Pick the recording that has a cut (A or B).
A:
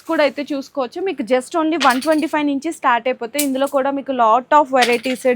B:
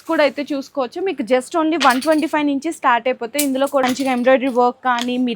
B